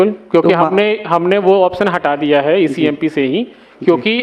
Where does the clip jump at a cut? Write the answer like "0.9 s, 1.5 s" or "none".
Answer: none